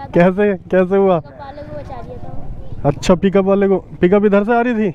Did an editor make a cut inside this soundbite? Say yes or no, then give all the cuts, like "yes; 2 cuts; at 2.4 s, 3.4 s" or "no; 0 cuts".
no; 0 cuts